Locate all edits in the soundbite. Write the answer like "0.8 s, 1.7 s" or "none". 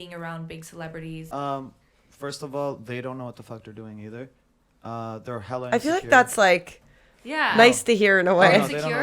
1.2 s